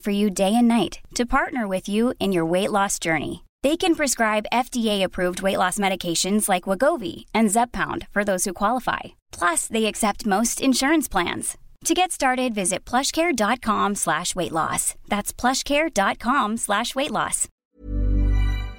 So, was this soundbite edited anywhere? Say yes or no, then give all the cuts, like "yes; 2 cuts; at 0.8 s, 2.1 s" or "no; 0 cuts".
yes; 1 cut; at 17.7 s